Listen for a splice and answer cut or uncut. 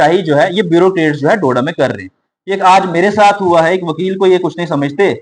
uncut